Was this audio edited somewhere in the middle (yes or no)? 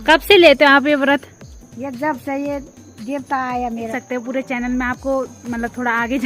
yes